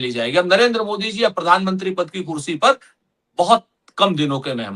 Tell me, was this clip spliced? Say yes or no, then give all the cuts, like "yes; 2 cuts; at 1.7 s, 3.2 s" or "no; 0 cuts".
no; 0 cuts